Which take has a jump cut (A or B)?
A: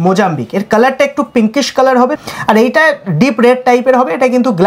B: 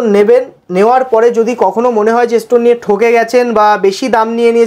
A